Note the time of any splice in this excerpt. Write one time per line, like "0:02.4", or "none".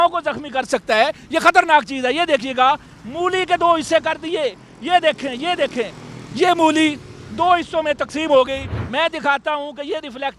0:08.8